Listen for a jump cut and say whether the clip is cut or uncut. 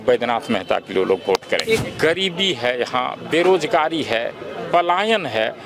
cut